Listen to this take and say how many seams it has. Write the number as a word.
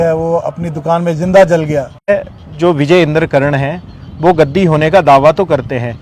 one